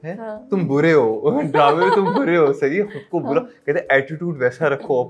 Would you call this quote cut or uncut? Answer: uncut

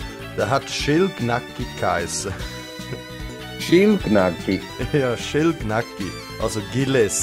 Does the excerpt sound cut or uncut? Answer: uncut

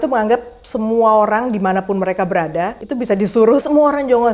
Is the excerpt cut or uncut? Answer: cut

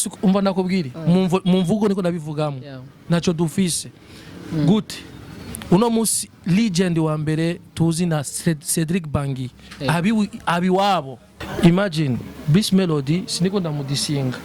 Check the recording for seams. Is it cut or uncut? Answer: cut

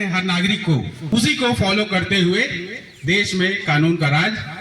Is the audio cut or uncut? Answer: cut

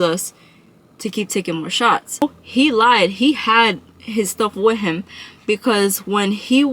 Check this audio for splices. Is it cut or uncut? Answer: cut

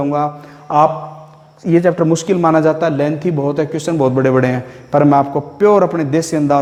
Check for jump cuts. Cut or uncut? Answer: uncut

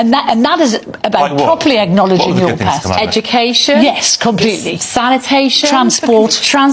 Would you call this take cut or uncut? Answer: uncut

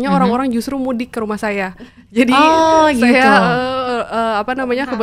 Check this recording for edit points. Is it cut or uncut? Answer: uncut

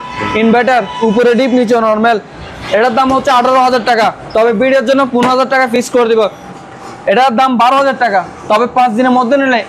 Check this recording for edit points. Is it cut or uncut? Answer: cut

